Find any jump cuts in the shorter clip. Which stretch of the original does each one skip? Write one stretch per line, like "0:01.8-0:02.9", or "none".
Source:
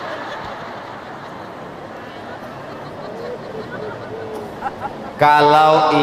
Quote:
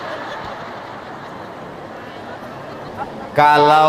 0:02.9-0:04.7